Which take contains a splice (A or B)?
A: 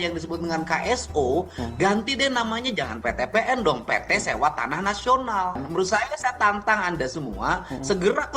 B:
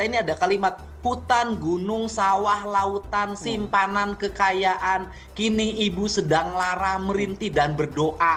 A